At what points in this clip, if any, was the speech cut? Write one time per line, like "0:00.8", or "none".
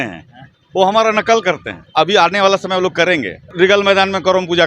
0:01.8
0:03.5